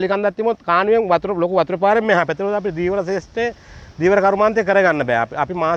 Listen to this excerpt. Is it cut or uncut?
uncut